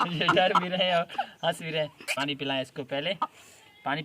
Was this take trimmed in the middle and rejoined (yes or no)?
yes